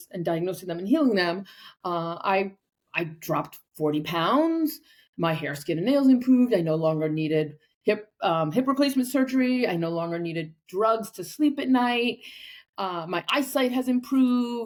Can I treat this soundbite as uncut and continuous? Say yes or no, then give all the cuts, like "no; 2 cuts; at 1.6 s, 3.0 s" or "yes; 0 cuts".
yes; 0 cuts